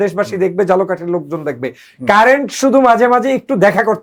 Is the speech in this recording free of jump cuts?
yes; 0 cuts

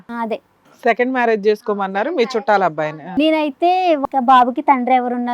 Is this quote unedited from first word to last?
no; 2 cuts; at 3.0 s, 4.0 s

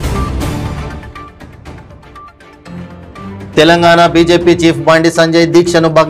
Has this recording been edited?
yes; 2 cuts; at 0.7 s, 3.4 s

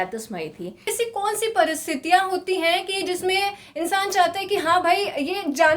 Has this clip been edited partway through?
yes; 1 cut; at 0.9 s

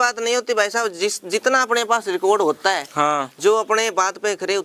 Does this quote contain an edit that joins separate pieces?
no; 0 cuts

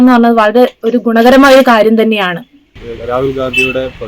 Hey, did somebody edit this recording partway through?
yes; 1 cut; at 2.6 s

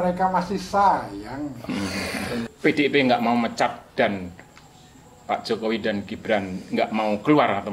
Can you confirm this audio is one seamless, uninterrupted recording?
no; 1 cut; at 2.4 s

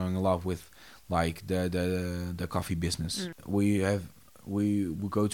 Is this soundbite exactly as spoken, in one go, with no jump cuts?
no; 1 cut; at 3.4 s

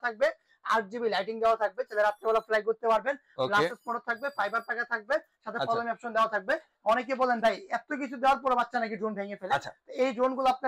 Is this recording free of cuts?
yes; 0 cuts

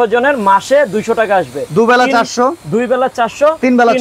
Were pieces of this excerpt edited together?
no; 0 cuts

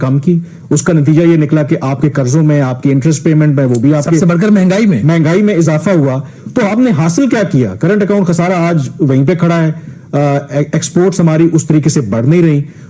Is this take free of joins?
yes; 0 cuts

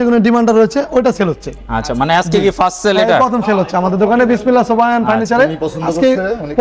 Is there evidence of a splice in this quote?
no; 0 cuts

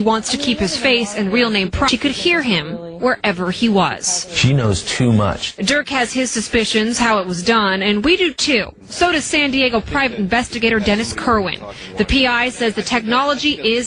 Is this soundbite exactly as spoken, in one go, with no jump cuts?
no; 1 cut; at 3.0 s

